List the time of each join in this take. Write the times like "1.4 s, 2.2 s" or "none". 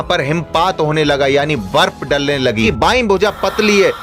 2.7 s